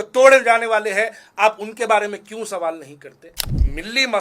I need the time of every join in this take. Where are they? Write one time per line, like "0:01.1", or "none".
0:03.3